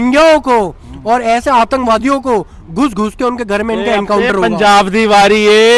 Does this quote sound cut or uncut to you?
uncut